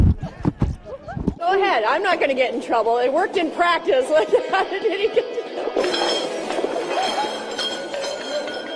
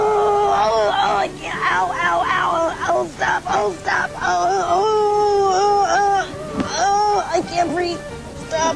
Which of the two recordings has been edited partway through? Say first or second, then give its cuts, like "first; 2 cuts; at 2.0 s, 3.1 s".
first; 1 cut; at 1.0 s